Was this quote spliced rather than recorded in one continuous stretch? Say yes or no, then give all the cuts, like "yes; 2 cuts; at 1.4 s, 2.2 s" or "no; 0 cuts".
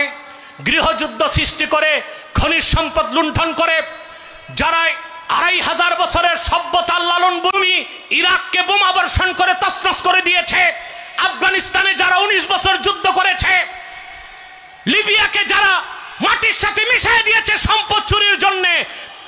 yes; 1 cut; at 7.5 s